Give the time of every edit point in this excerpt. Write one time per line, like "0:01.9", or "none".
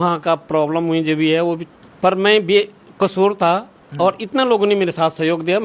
0:01.8